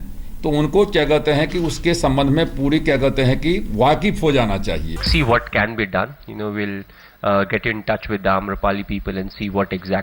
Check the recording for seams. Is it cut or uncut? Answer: cut